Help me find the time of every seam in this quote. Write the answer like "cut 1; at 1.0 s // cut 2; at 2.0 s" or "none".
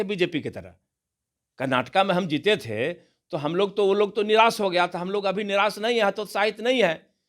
none